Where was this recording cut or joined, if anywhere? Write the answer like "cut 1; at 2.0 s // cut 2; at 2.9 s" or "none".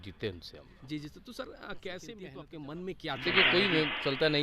cut 1; at 2.3 s